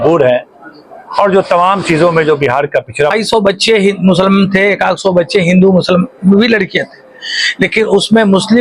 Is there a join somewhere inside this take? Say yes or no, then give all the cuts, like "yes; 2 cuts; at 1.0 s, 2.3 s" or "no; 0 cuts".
yes; 1 cut; at 3.1 s